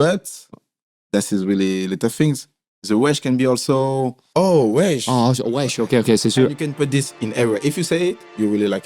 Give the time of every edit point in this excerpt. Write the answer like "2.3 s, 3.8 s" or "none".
4.2 s